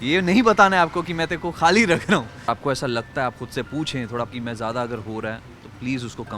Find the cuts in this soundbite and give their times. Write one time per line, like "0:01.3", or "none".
0:02.4
0:04.3